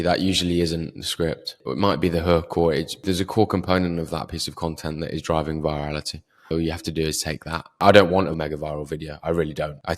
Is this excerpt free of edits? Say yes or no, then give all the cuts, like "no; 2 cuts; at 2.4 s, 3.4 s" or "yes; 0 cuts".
no; 2 cuts; at 7.7 s, 8.3 s